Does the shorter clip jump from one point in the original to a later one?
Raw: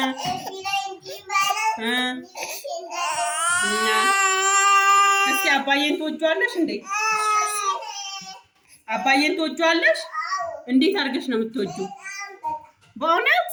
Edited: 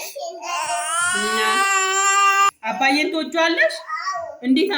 yes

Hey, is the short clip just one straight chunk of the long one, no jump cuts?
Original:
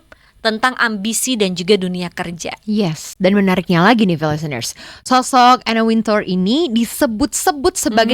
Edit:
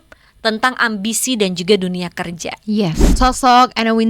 no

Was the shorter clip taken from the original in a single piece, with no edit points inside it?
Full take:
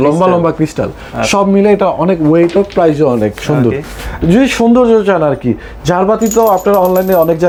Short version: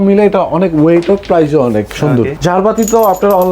no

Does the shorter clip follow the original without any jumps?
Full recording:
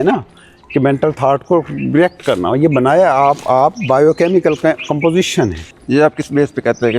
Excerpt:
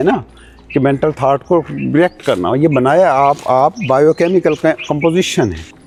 yes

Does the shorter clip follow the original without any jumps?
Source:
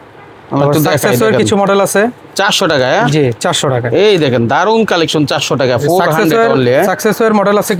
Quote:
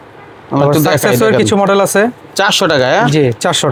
yes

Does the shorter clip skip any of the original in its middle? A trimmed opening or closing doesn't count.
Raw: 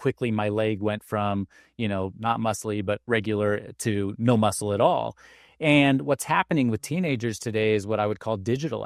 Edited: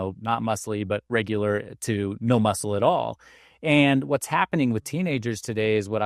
no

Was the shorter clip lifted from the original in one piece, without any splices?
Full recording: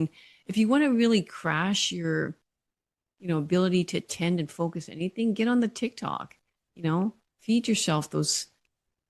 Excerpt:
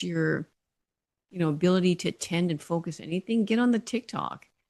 yes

